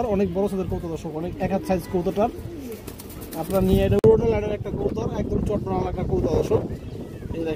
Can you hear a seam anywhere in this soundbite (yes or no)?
yes